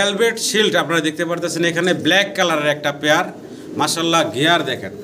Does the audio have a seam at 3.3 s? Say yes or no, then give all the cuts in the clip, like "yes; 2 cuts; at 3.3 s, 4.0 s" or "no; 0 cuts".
no; 0 cuts